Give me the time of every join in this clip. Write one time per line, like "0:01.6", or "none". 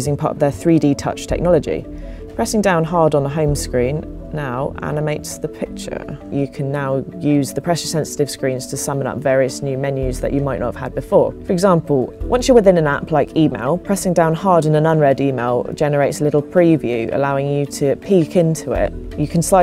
0:09.8